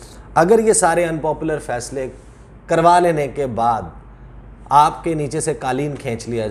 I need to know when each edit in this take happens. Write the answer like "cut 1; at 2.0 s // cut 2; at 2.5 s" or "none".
none

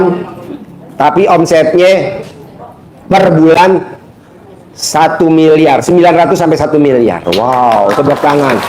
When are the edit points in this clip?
none

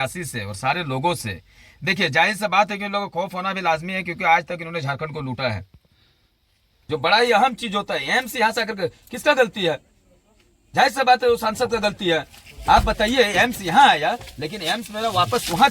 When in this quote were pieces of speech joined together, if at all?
cut 1; at 6.8 s

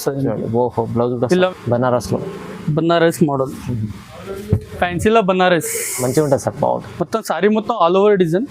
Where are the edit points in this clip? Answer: cut 1; at 1.5 s

